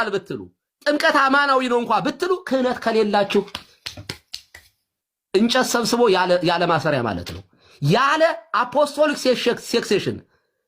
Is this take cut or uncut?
cut